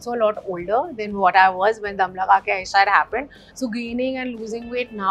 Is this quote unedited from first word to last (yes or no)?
yes